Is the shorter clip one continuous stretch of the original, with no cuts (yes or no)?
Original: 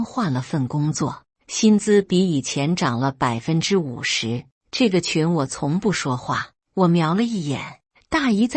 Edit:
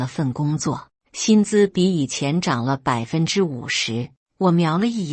no